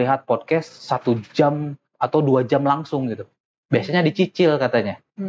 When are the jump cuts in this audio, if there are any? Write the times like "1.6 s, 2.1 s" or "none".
none